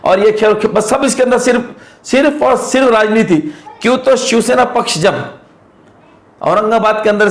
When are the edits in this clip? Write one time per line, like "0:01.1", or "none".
none